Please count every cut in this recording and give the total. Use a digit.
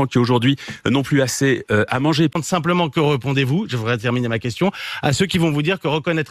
1